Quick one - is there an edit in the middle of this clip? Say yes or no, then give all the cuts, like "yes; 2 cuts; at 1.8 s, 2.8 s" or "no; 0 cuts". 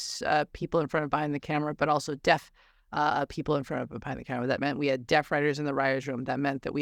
no; 0 cuts